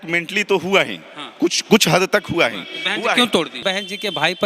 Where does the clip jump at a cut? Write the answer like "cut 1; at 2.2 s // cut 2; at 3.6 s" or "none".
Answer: cut 1; at 3.5 s